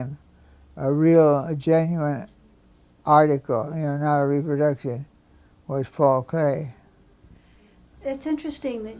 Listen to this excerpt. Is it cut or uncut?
cut